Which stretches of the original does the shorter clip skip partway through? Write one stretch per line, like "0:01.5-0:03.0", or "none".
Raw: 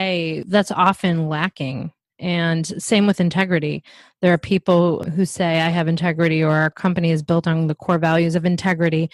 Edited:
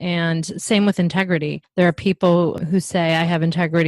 0:03.8-0:04.0